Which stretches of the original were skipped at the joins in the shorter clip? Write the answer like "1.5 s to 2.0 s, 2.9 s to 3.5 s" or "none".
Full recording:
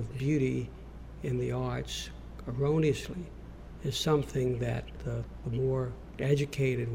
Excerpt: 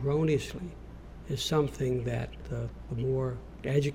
none